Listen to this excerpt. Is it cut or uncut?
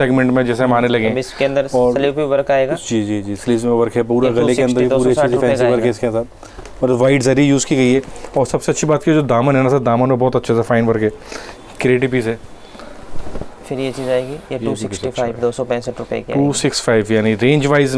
uncut